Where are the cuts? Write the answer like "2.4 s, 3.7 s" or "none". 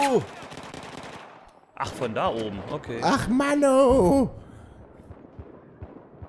3.0 s, 4.3 s